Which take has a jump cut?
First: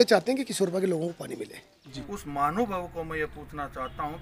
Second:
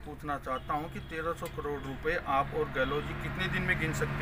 first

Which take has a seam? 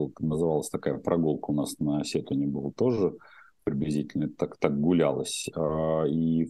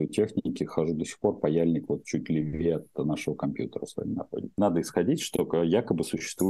second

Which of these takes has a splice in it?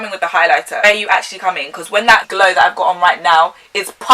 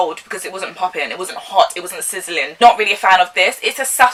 first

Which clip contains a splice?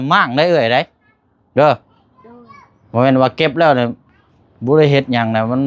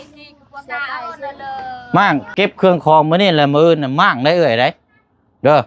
second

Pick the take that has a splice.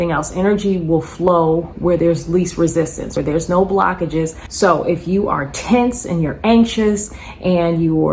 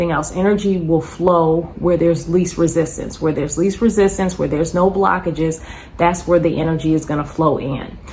first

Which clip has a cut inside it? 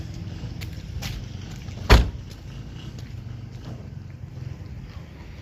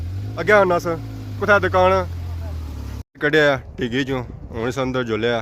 second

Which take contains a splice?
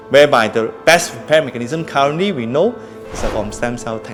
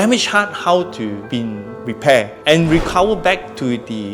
second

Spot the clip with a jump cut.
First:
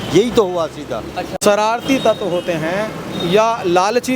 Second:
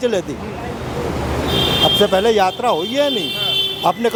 first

